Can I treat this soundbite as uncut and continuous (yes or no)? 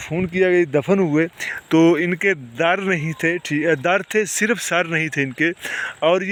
yes